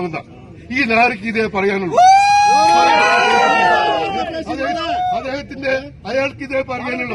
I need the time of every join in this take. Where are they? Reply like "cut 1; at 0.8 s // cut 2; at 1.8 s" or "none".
none